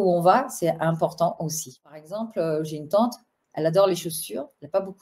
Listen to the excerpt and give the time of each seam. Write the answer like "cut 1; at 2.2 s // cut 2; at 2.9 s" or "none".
cut 1; at 2.1 s